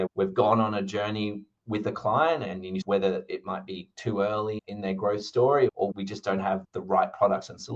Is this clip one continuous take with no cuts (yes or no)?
yes